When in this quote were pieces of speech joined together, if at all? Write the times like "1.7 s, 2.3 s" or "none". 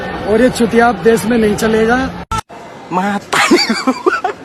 none